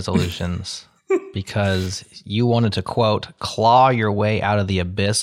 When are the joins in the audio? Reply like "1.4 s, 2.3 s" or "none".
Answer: none